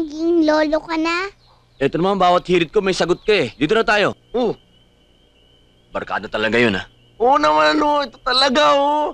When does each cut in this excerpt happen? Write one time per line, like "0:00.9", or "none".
0:04.2